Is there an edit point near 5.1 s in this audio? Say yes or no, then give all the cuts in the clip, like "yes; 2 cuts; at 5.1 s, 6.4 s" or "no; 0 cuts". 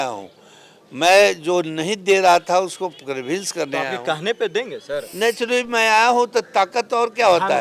yes; 1 cut; at 5.1 s